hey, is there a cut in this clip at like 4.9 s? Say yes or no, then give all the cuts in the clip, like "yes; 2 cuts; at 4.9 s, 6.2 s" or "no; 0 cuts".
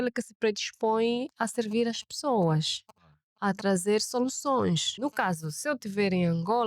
yes; 1 cut; at 4.9 s